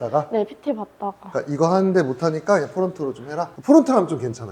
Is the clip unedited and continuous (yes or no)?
yes